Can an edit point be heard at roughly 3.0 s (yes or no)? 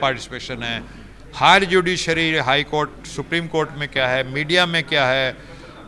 no